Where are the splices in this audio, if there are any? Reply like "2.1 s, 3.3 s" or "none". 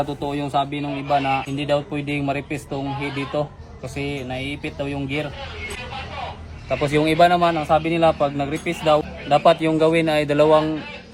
1.5 s, 5.8 s, 9.1 s